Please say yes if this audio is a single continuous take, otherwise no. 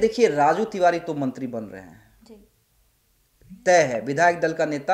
yes